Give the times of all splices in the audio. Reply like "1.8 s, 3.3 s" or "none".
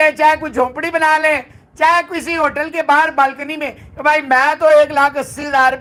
none